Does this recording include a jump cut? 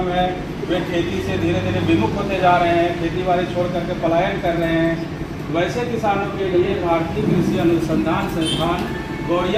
no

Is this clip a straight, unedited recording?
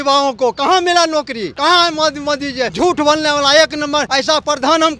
no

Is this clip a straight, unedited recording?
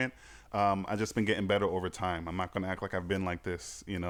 yes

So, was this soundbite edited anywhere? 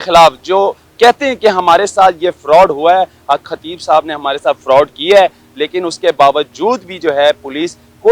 no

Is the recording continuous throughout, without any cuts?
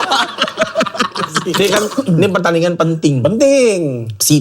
no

